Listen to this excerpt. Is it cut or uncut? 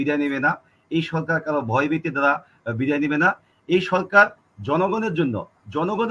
uncut